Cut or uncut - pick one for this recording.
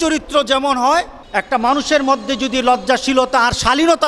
cut